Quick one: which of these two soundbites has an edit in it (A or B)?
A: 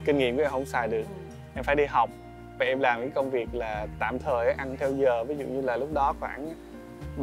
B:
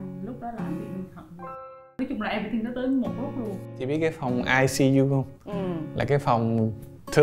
B